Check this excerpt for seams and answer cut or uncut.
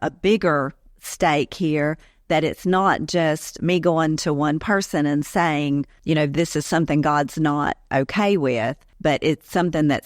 uncut